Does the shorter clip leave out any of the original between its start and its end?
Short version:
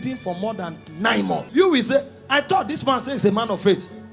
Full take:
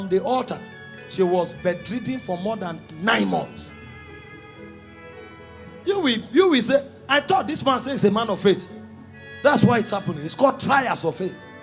yes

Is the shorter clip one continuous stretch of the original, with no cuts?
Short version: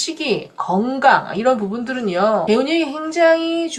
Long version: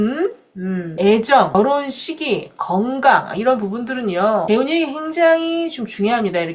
yes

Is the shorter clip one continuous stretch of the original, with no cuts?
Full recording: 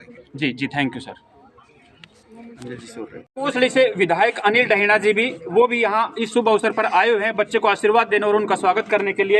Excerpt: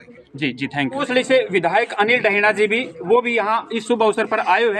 no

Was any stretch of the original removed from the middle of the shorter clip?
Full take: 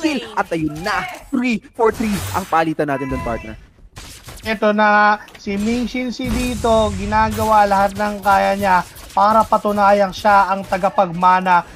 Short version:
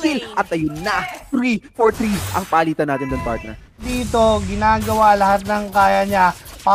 yes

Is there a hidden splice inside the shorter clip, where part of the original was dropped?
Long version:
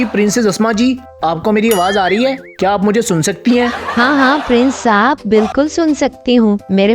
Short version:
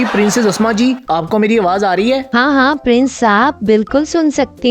yes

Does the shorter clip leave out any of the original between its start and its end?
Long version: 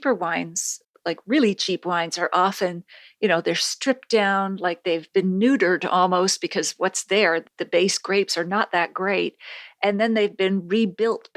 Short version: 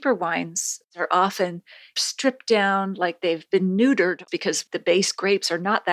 yes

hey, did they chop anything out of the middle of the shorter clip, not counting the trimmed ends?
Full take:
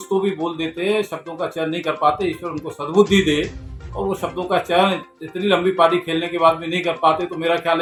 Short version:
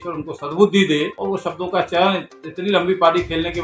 yes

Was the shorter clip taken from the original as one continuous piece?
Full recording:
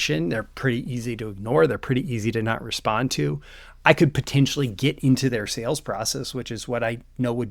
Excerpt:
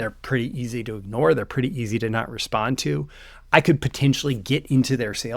yes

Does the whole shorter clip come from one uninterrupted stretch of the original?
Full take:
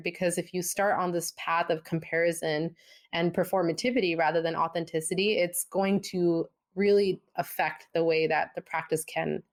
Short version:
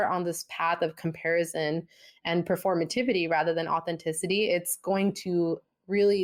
yes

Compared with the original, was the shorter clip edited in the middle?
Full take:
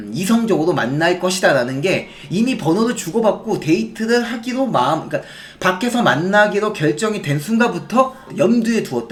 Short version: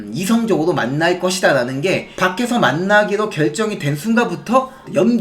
yes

